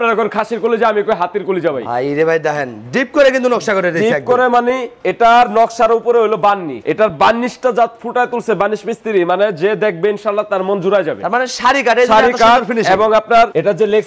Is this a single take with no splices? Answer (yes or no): yes